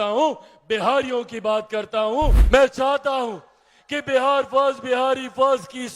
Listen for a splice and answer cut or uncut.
cut